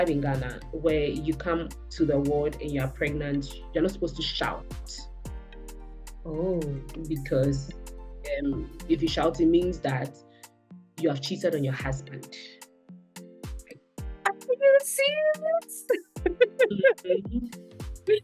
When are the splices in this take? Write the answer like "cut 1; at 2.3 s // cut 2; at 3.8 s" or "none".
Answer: none